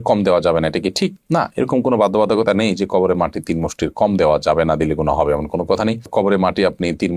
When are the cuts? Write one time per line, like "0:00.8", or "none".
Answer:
none